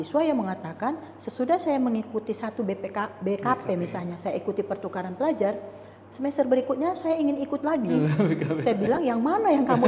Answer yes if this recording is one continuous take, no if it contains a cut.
yes